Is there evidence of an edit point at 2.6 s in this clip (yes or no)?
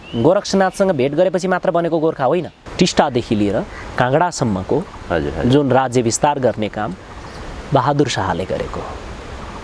yes